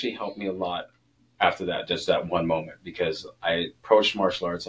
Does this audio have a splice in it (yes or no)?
no